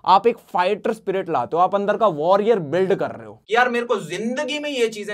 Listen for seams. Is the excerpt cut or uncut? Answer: cut